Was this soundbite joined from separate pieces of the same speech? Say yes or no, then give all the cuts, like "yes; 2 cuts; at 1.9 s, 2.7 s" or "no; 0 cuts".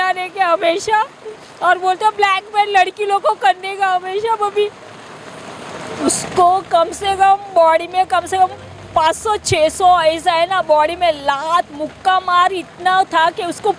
yes; 1 cut; at 5.9 s